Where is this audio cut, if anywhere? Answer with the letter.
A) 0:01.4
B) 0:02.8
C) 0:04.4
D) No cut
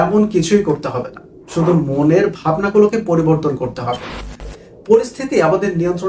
C